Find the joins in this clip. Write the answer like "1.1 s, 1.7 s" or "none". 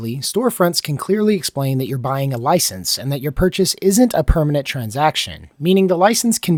none

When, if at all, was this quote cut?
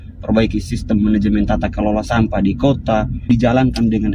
3.1 s

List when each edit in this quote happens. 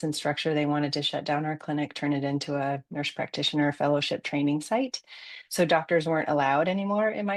none

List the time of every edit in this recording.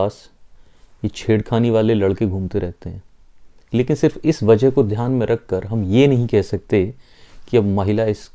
none

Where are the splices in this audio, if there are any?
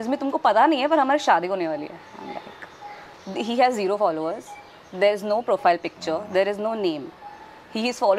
none

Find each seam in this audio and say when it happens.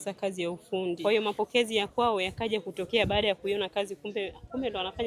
1.0 s

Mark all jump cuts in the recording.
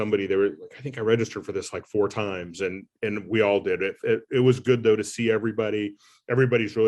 none

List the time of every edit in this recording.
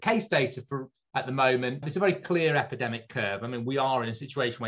none

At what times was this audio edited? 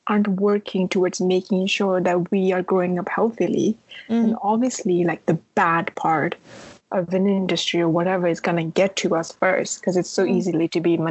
none

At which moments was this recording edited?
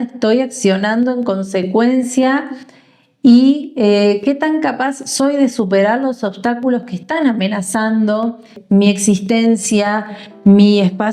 8.5 s

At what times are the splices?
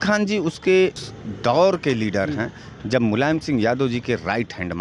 0.9 s

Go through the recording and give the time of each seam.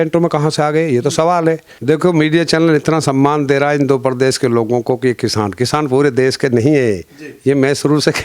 1.7 s

